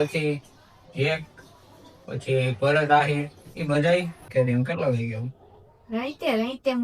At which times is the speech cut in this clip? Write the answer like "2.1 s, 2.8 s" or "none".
4.3 s